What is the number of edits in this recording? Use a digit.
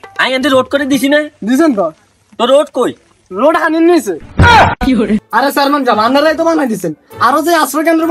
1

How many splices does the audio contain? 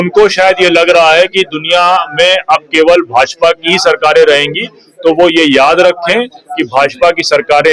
0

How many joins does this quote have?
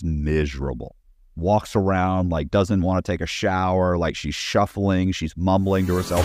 0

